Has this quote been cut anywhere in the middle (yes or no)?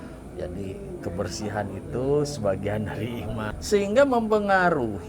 yes